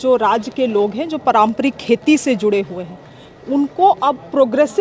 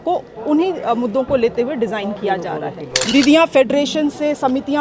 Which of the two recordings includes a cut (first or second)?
second